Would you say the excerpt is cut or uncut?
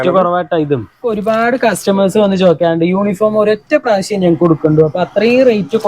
cut